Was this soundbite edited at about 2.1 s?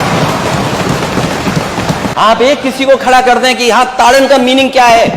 yes; 1 cut; at 2.1 s

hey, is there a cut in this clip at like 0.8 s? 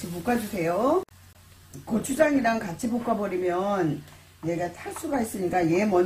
no; 0 cuts

